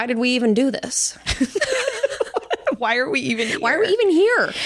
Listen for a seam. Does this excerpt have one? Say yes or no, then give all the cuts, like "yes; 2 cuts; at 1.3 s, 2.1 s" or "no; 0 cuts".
no; 0 cuts